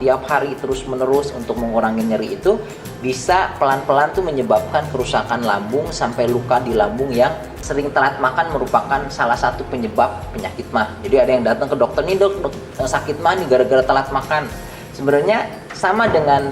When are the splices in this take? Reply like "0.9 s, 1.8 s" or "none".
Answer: 7.5 s